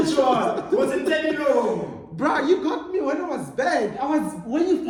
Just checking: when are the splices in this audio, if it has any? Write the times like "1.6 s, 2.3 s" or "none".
none